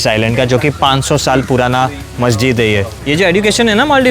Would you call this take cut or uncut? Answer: cut